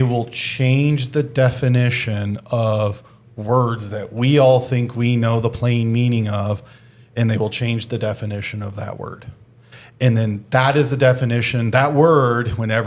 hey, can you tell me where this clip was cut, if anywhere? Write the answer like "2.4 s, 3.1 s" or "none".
none